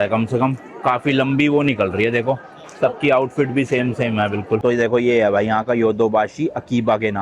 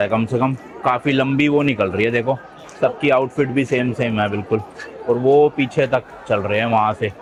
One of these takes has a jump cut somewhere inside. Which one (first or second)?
first